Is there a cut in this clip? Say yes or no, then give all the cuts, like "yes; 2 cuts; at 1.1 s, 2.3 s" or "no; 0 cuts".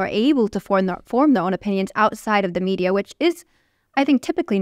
no; 0 cuts